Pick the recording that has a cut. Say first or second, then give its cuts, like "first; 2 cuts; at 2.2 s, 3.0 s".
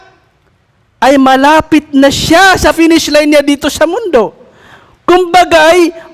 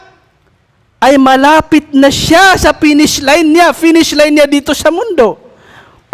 first; 1 cut; at 2.7 s